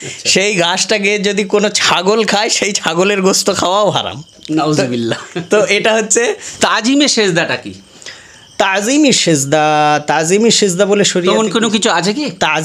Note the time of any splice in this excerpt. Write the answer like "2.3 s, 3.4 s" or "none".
6.5 s